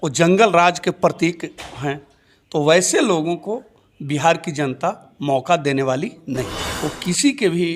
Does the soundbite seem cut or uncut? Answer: cut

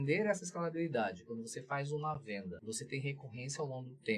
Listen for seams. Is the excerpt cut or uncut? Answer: cut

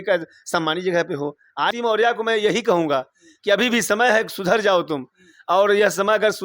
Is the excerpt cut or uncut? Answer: cut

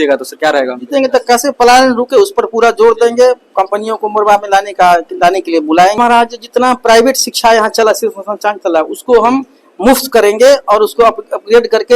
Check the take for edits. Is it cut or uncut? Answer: cut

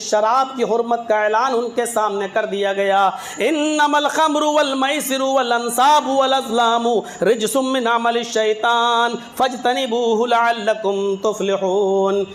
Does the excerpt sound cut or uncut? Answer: uncut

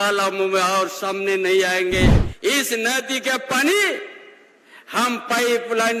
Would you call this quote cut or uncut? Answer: cut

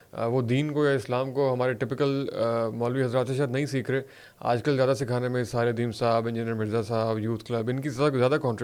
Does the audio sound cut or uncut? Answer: uncut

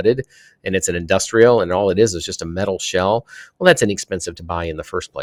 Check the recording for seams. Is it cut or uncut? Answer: uncut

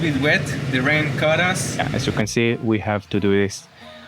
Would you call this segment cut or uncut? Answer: cut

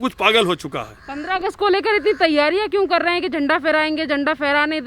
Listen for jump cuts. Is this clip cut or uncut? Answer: uncut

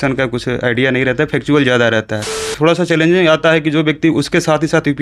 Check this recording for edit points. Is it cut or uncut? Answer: cut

